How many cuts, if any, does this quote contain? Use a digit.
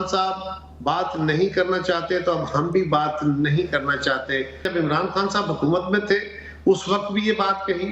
1